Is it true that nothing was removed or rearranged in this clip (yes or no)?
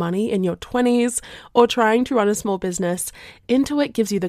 yes